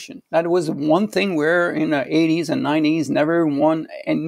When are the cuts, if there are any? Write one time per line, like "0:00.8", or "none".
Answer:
none

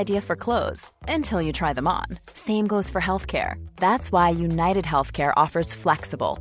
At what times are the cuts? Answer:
none

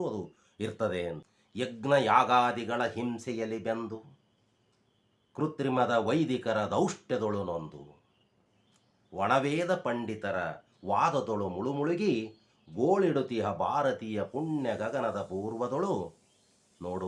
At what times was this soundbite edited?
0:01.4

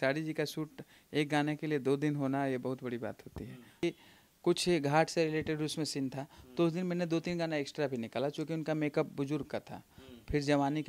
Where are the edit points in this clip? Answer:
0:03.8

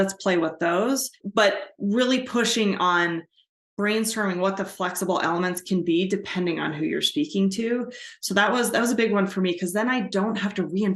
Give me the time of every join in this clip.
0:01.2

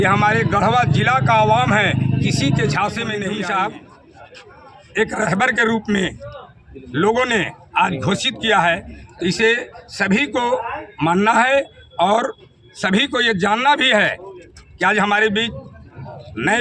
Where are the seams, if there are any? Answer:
0:03.2

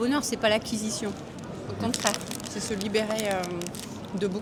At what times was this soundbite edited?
none

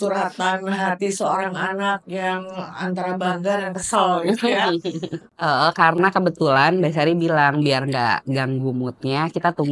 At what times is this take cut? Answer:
0:05.2

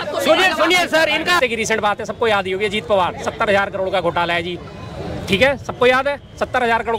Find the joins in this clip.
0:01.4

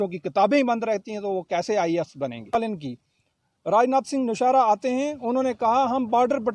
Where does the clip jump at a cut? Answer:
0:02.5

